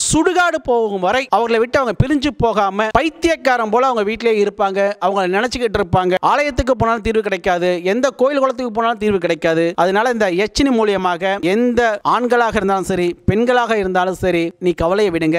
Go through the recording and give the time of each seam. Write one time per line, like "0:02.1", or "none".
0:06.2
0:09.7
0:14.5